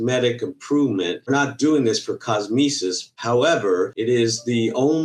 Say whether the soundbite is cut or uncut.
cut